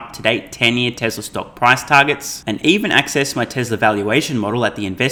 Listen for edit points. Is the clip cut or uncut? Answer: uncut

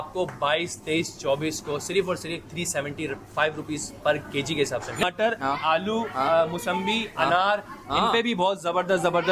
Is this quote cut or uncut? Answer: cut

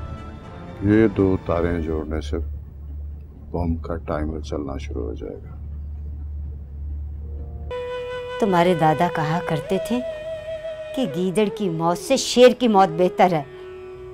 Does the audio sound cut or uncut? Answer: cut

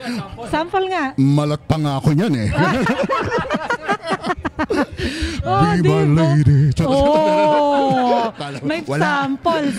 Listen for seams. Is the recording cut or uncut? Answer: uncut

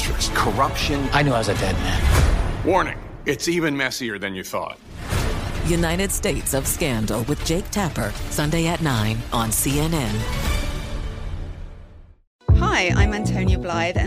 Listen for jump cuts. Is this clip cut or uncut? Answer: cut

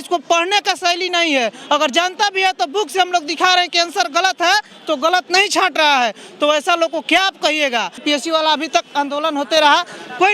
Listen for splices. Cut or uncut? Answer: cut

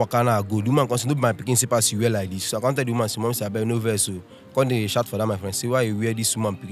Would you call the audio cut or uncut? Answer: uncut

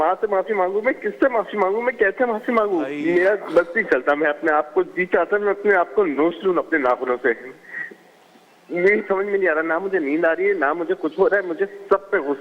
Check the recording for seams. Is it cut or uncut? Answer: cut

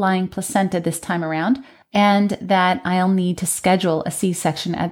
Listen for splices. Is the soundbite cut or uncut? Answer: cut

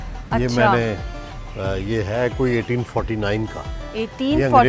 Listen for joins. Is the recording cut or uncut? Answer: uncut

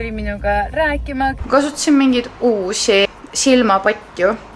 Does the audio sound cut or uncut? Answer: cut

